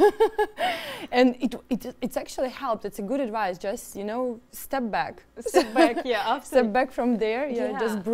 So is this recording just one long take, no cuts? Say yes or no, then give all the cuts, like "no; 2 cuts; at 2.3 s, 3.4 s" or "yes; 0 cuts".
yes; 0 cuts